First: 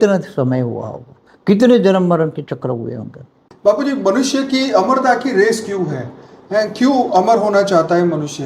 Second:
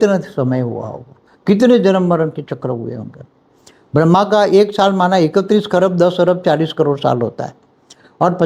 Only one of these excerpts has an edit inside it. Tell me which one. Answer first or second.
first